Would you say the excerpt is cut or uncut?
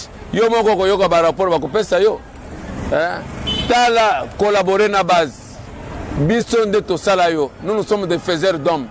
uncut